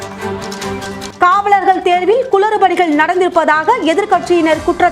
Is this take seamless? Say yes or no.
no